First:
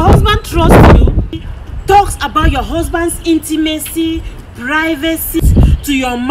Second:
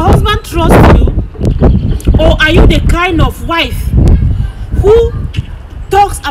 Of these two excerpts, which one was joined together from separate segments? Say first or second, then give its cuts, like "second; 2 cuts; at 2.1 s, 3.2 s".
first; 2 cuts; at 1.3 s, 5.4 s